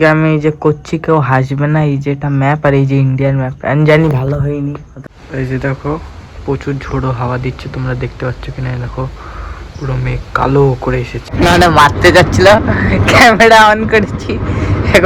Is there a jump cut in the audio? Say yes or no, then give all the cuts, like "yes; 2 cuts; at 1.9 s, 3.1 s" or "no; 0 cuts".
yes; 2 cuts; at 5.0 s, 11.4 s